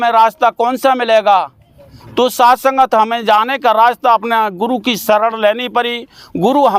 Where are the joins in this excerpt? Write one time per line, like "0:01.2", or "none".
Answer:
none